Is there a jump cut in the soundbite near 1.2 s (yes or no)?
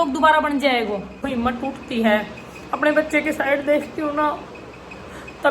yes